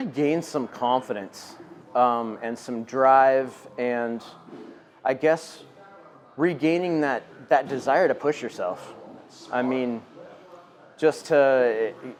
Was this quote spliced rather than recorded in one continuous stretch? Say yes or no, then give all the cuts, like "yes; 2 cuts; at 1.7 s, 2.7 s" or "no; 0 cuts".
no; 0 cuts